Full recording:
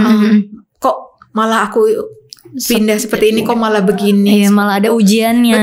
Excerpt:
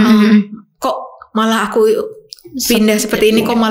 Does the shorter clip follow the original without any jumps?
yes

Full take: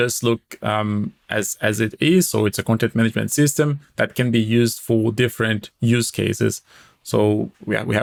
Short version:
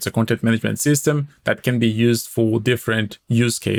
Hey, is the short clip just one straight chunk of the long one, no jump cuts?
yes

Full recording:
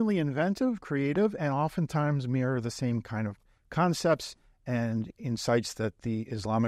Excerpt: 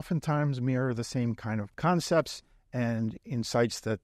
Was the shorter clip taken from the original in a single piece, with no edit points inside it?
no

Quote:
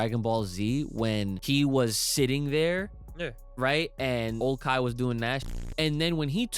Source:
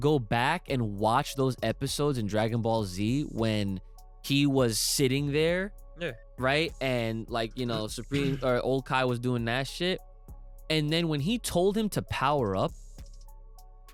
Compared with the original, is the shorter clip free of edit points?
no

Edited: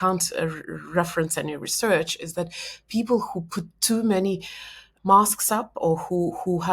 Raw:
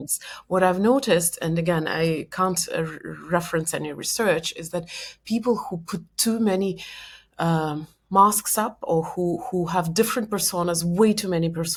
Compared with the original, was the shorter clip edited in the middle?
yes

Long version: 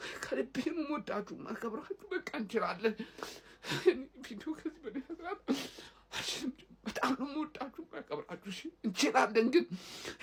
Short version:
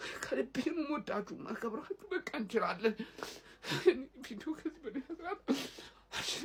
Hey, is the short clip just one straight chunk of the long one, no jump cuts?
yes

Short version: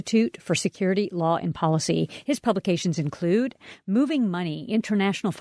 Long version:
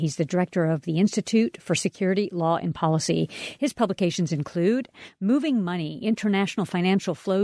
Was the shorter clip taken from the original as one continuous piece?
no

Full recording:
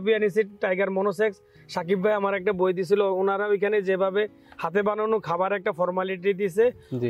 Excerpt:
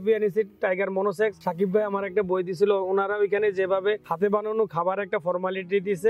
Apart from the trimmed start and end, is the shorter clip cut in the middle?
yes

